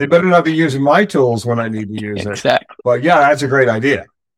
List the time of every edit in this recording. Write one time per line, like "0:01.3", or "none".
0:02.7

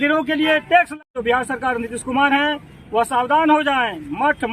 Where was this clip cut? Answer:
0:01.0

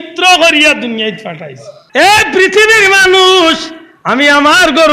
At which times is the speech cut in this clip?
0:01.9

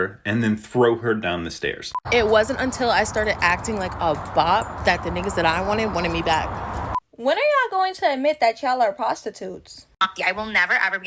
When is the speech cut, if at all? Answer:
0:02.0
0:07.1
0:10.1

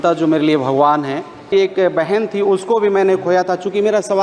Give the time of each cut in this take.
0:01.5

